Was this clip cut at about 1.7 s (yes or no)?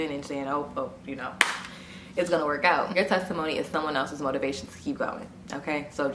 no